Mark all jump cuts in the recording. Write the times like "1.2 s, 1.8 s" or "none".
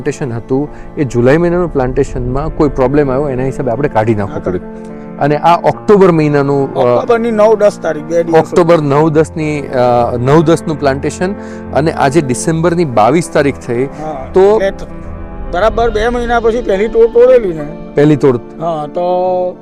none